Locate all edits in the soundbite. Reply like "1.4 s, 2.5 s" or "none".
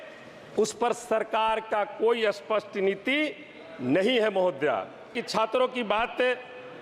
5.2 s